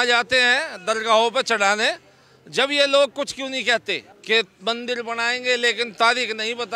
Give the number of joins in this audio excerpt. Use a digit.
1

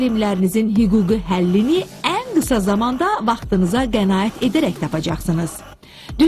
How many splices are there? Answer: 1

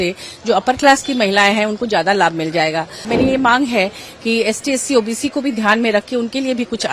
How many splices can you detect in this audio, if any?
1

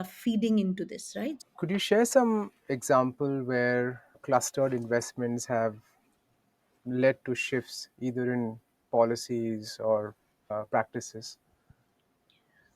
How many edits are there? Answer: 1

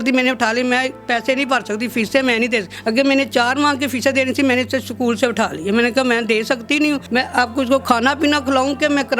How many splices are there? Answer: 2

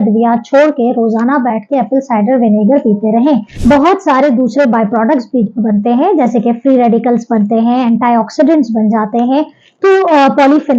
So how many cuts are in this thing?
1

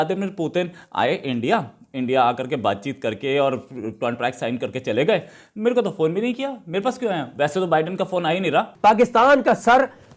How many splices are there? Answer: 1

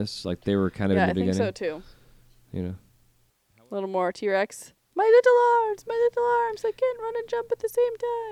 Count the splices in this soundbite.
1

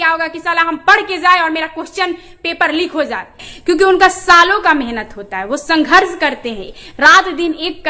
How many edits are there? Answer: 1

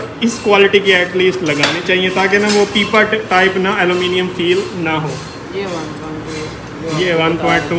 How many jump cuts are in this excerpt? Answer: 0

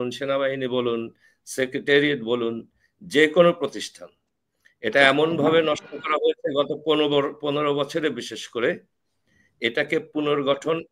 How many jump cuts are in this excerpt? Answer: 0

